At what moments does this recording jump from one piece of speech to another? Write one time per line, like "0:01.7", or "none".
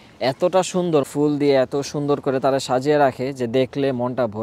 0:01.1